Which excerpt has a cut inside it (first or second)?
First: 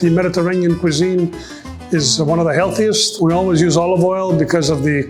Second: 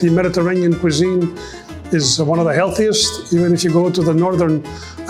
first